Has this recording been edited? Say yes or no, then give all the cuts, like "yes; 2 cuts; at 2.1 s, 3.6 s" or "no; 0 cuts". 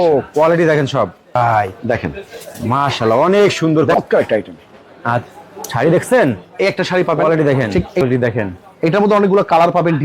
yes; 3 cuts; at 1.4 s, 3.9 s, 8.0 s